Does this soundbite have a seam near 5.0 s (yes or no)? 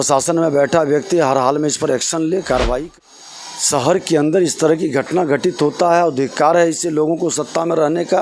no